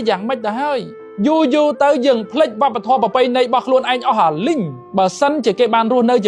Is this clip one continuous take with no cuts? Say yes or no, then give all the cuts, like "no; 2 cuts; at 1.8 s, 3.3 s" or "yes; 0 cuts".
no; 2 cuts; at 1.0 s, 4.8 s